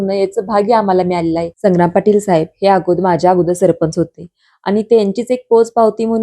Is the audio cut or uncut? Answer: cut